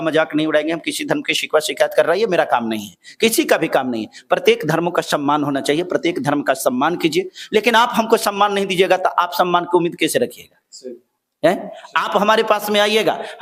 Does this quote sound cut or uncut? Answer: uncut